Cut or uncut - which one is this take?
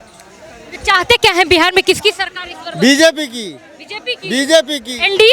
uncut